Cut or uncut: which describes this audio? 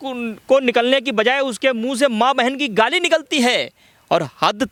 uncut